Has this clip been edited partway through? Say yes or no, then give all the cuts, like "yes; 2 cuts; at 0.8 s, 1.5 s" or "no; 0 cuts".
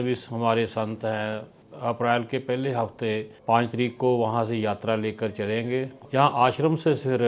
yes; 3 cuts; at 1.6 s, 3.3 s, 6.0 s